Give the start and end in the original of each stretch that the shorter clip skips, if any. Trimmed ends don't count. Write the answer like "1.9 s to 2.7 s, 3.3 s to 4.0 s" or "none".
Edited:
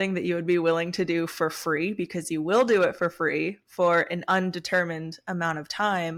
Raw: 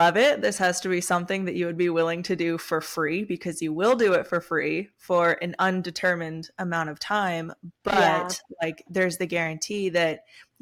none